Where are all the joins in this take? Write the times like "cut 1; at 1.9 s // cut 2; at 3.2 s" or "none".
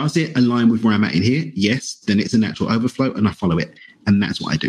none